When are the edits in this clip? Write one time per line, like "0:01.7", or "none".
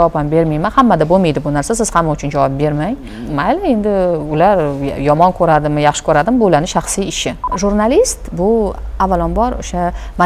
0:03.1
0:07.5